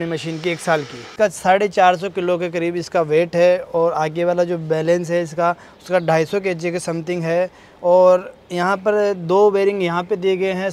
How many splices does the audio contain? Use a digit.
1